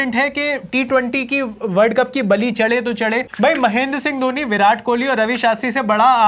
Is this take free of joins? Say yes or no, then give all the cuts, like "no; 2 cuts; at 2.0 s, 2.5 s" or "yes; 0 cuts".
no; 1 cut; at 3.3 s